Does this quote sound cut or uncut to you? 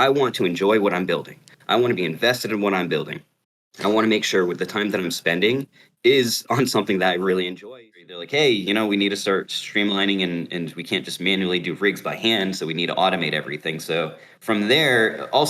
cut